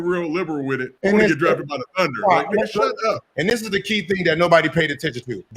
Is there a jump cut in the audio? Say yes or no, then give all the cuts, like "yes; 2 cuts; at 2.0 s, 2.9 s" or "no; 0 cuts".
yes; 2 cuts; at 0.9 s, 3.3 s